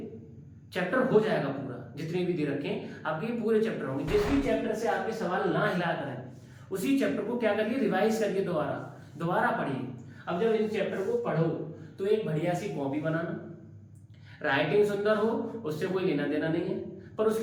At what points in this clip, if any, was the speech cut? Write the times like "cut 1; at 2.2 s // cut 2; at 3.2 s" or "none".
none